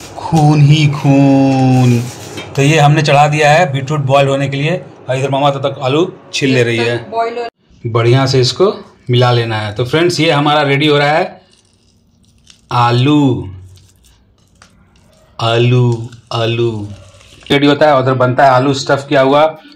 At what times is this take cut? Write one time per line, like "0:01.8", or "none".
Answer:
0:07.5
0:17.5